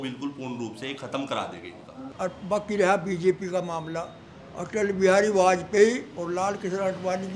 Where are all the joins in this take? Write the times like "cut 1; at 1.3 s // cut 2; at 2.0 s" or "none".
cut 1; at 2.1 s